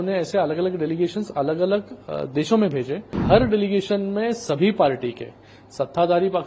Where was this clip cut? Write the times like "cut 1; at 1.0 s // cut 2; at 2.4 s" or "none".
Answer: cut 1; at 3.1 s

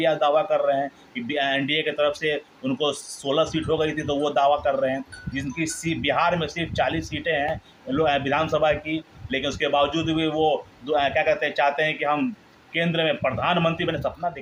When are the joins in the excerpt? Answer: none

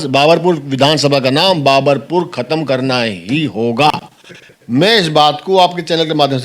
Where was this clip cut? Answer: cut 1; at 3.9 s

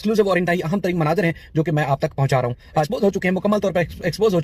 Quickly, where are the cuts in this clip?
cut 1; at 2.9 s

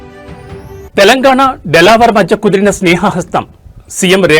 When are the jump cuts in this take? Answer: none

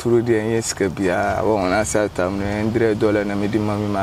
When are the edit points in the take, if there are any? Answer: none

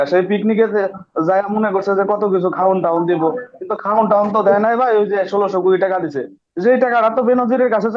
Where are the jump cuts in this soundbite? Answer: none

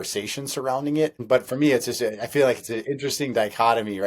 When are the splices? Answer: cut 1; at 1.2 s

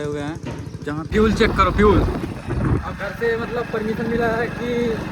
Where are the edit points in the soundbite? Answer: cut 1; at 1.1 s

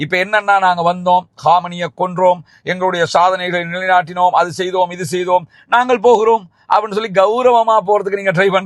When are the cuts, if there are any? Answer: none

